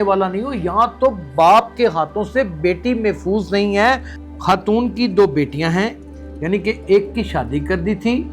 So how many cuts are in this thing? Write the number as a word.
two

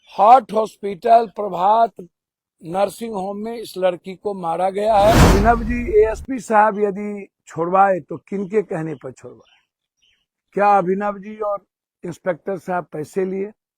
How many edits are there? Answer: one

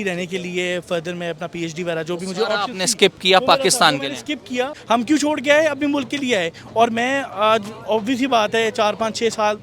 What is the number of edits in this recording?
one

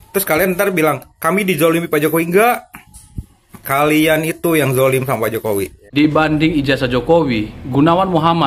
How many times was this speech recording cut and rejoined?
one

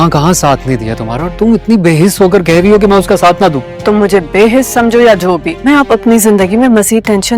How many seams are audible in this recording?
two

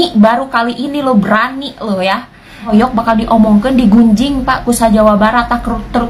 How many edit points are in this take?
one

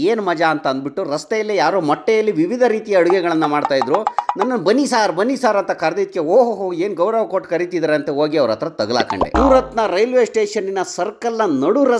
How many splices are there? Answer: one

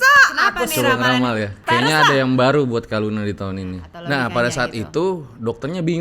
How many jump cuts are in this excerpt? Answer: two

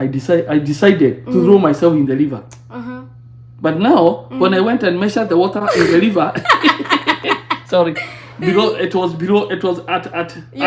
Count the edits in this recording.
zero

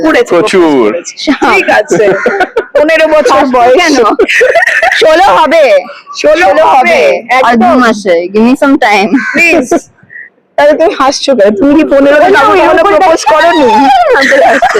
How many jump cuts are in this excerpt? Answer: zero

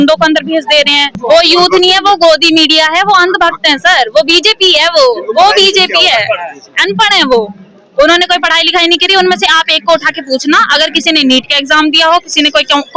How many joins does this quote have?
one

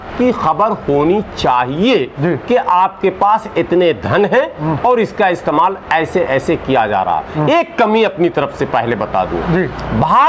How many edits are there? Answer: zero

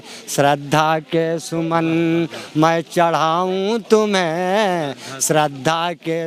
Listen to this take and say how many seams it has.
zero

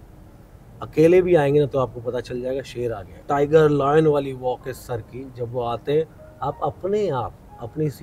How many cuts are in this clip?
one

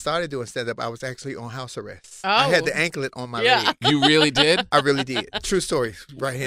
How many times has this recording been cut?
one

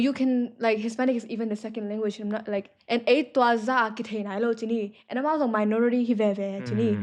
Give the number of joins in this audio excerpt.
one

